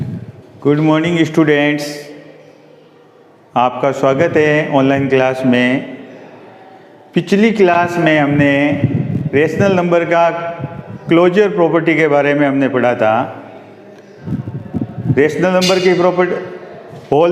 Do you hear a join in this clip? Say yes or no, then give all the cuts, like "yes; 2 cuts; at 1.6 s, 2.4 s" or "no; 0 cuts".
yes; 1 cut; at 1.2 s